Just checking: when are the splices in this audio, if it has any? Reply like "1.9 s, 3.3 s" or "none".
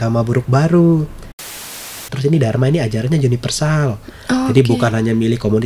1.5 s